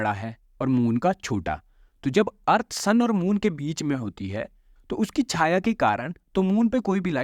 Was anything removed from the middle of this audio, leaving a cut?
no; 0 cuts

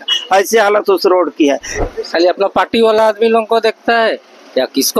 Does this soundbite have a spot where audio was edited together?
yes; 1 cut; at 1.7 s

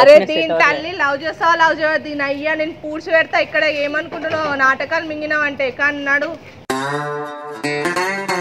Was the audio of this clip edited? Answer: no; 0 cuts

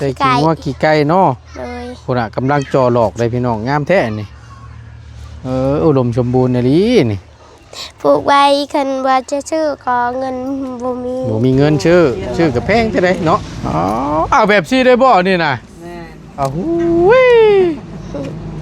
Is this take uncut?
no; 1 cut; at 13.5 s

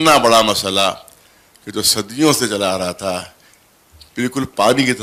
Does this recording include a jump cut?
no; 0 cuts

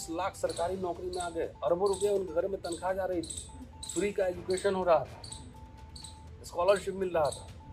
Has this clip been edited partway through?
no; 0 cuts

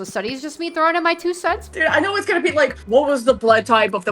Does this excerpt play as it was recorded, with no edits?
no; 2 cuts; at 1.6 s, 2.8 s

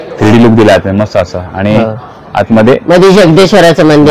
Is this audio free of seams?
yes; 0 cuts

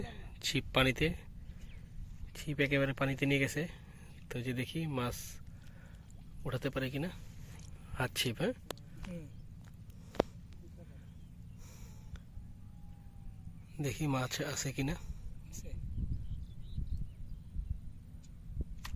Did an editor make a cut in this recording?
no; 0 cuts

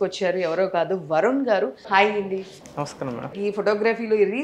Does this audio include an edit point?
yes; 2 cuts; at 1.8 s, 3.3 s

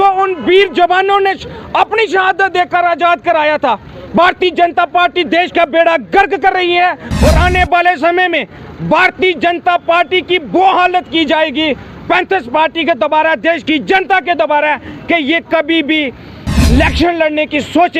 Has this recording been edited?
no; 0 cuts

